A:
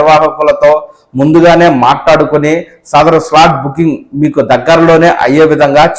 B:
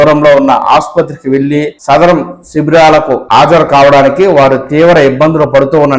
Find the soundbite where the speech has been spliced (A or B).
B